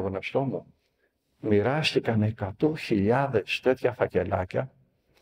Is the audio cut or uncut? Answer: uncut